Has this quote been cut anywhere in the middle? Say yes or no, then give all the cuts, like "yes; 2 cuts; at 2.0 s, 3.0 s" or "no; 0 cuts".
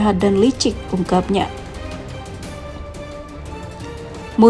yes; 2 cuts; at 1.5 s, 3.6 s